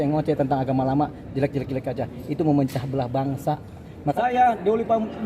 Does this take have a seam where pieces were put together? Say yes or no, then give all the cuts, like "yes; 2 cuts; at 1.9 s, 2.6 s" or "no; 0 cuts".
yes; 1 cut; at 4.0 s